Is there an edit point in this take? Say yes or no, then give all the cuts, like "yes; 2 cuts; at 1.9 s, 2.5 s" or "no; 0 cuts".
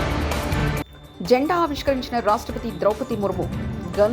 yes; 1 cut; at 1.0 s